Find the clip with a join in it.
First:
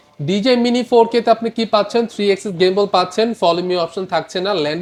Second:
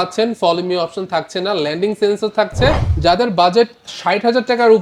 second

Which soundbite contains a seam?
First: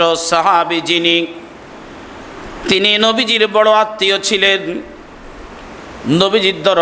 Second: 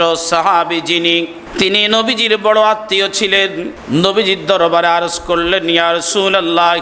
second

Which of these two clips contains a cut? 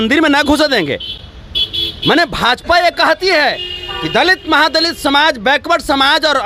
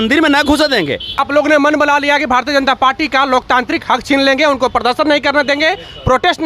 second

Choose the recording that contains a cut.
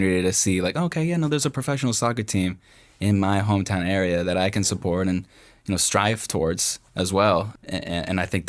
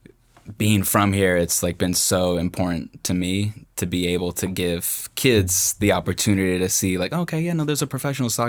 first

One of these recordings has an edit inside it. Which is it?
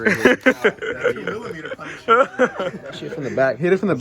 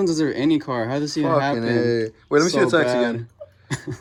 first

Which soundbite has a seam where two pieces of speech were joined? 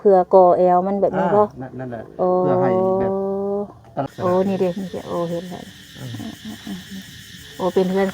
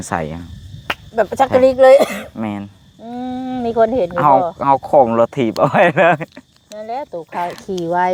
first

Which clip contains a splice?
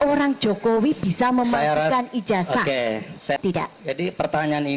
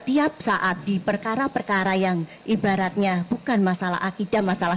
first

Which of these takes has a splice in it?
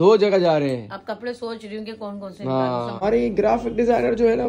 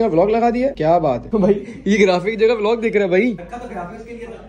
first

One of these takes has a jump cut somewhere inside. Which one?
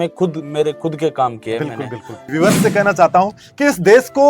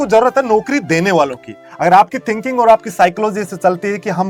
first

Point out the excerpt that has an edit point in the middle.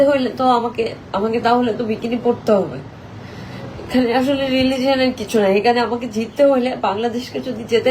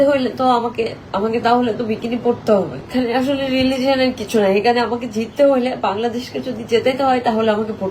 second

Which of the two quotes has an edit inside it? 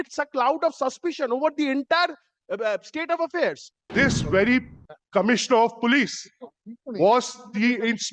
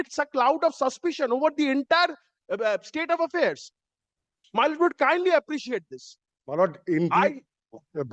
first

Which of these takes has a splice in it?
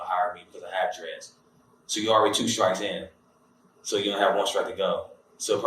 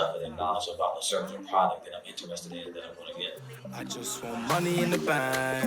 second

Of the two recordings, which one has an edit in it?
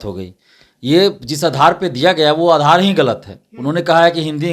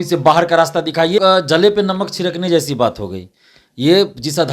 second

